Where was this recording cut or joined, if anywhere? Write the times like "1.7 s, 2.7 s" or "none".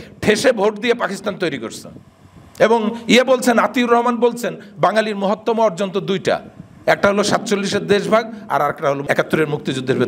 none